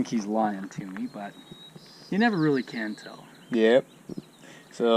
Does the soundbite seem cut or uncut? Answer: uncut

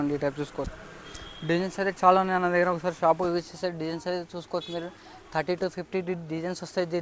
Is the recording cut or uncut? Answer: uncut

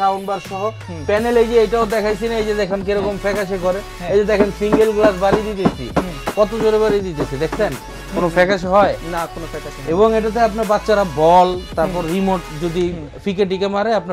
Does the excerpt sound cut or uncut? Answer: uncut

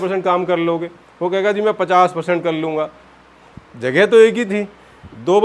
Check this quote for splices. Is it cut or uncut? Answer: uncut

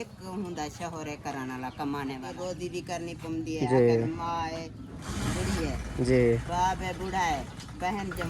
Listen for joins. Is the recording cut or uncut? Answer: cut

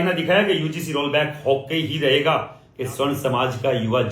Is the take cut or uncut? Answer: cut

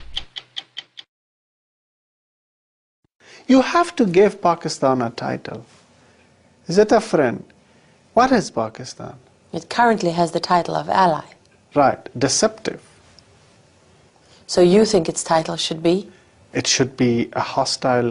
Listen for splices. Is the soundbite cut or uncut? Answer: cut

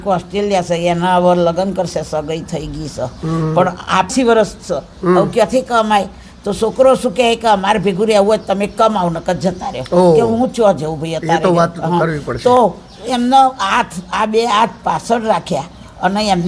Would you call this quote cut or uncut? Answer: cut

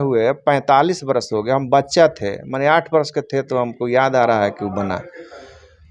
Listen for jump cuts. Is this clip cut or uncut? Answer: uncut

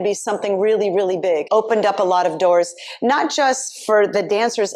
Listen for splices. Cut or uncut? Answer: cut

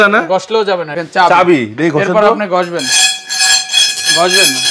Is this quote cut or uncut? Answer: cut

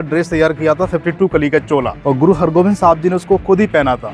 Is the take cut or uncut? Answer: uncut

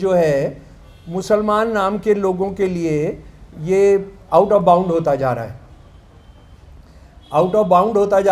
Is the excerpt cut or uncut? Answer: uncut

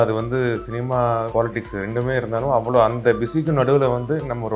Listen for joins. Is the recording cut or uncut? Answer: cut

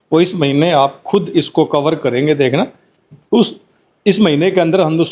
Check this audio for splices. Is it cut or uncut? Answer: uncut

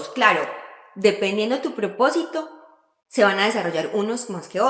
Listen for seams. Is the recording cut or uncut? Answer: uncut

